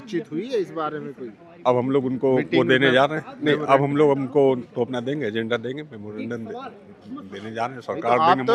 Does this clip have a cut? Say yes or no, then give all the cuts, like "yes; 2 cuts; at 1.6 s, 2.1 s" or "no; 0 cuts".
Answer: no; 0 cuts